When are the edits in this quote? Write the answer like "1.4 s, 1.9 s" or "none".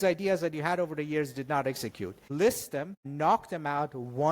2.2 s, 3.0 s